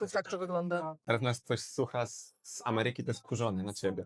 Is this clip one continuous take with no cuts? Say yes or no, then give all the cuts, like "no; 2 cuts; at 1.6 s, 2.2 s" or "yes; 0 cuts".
no; 1 cut; at 1.0 s